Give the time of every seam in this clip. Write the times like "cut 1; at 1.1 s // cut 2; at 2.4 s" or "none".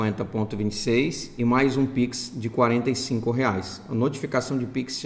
cut 1; at 1.2 s